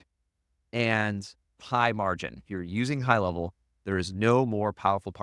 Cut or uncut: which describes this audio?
cut